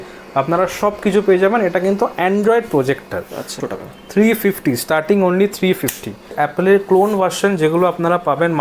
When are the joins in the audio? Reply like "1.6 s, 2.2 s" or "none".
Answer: 3.6 s, 6.3 s

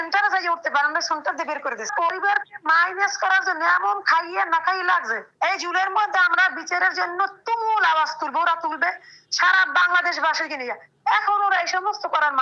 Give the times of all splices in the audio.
1.9 s, 5.2 s

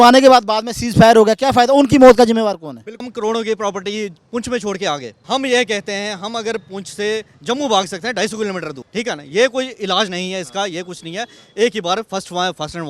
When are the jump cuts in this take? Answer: 3.0 s, 5.1 s, 8.8 s

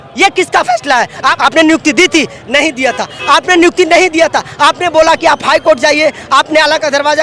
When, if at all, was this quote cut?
1.2 s

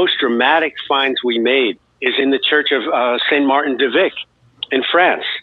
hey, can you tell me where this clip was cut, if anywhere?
none

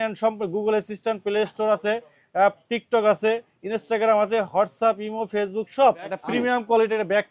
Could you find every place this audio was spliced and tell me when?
6.2 s

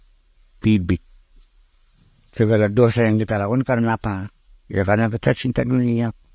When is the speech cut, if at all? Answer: none

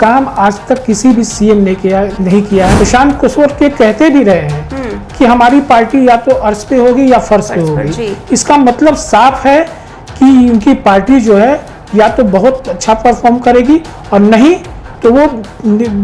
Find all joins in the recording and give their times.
2.7 s

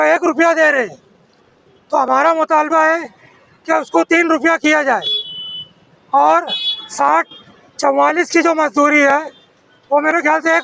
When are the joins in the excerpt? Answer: none

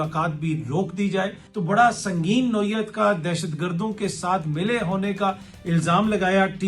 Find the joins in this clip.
1.4 s

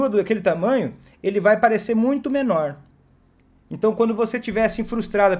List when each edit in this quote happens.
none

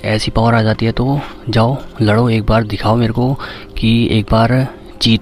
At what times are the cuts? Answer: none

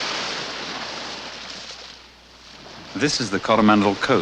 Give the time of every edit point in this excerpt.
2.9 s

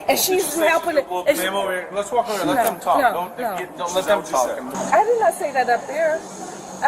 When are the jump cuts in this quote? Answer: 4.7 s

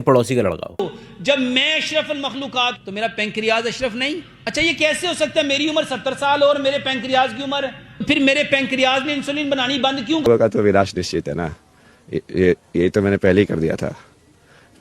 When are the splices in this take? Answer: 0.9 s, 2.8 s, 4.3 s, 7.7 s, 10.2 s

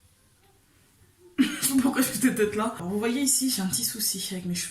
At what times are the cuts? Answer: 2.8 s

